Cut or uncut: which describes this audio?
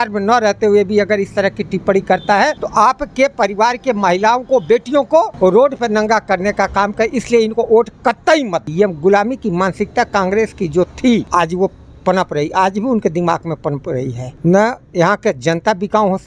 cut